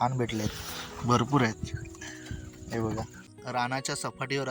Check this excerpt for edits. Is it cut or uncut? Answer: cut